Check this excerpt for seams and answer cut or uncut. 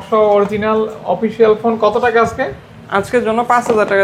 uncut